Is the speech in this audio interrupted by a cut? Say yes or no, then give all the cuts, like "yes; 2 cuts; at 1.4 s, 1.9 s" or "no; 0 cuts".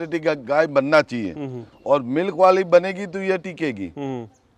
no; 0 cuts